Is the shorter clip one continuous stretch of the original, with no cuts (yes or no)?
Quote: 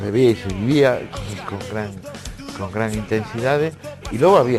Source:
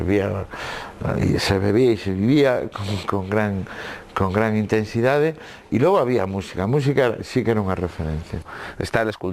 yes